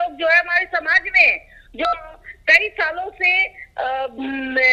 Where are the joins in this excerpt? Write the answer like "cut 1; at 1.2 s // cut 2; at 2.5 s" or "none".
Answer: none